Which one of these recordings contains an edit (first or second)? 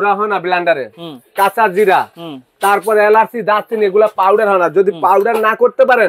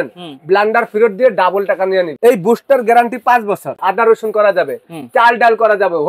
second